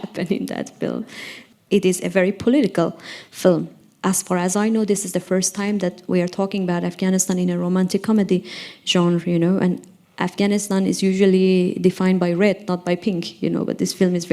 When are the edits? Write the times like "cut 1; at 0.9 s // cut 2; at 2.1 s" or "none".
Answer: cut 1; at 1.5 s // cut 2; at 3.8 s